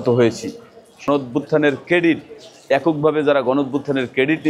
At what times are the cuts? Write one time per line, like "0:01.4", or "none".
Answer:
0:01.1